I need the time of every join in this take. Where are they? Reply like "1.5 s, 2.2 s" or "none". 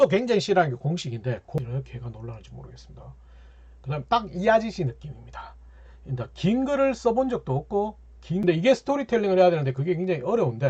1.6 s, 8.4 s